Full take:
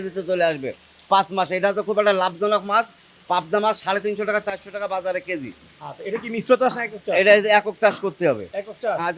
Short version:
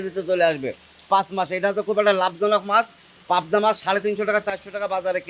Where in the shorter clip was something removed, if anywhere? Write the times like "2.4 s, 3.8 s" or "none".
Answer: none